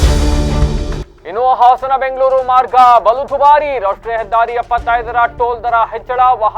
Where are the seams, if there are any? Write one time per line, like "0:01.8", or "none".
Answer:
0:01.1